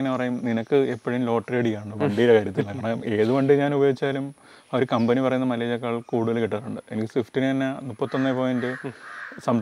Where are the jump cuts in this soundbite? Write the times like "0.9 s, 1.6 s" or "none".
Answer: none

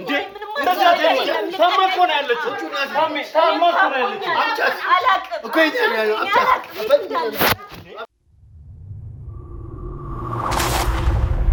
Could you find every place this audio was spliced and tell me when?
none

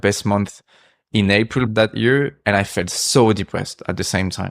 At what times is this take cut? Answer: 1.7 s

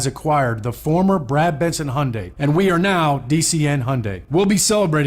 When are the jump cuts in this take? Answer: 2.2 s, 4.1 s

